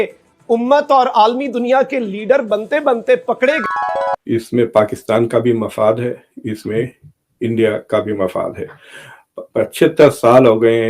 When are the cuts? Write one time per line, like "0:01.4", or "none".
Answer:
0:03.6